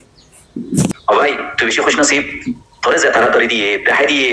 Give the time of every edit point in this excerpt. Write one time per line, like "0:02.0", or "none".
0:01.0